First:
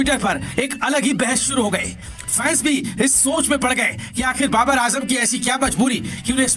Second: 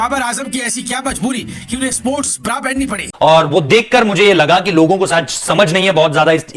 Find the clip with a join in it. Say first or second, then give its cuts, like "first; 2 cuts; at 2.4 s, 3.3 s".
second; 1 cut; at 3.1 s